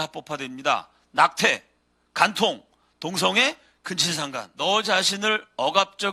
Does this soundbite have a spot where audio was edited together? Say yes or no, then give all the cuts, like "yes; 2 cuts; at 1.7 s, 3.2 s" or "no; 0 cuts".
yes; 1 cut; at 4.4 s